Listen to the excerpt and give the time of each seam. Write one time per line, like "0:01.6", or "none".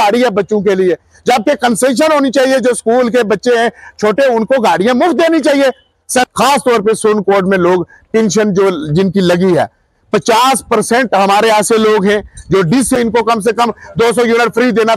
0:06.3
0:13.0